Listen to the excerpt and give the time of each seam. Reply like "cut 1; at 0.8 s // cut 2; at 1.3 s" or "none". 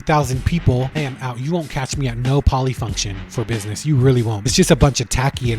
cut 1; at 0.9 s // cut 2; at 4.5 s